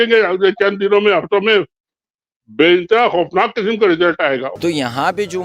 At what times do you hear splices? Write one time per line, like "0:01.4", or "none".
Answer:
0:04.5